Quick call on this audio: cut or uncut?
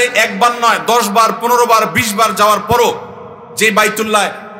uncut